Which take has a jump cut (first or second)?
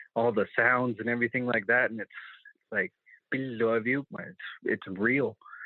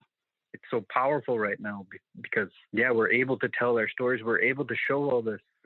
second